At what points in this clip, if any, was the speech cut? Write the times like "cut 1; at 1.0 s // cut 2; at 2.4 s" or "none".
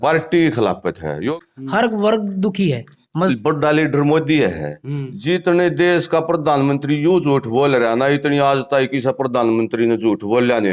cut 1; at 1.3 s // cut 2; at 3.3 s